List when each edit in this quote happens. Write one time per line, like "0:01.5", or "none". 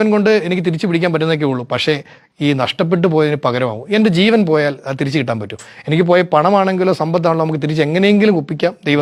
none